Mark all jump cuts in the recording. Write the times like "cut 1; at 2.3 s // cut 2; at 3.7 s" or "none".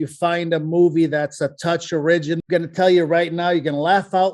cut 1; at 2.4 s